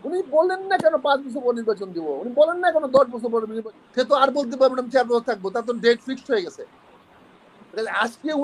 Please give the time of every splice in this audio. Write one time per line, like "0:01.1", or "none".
0:03.5